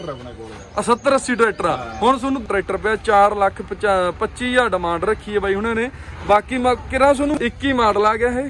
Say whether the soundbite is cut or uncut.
cut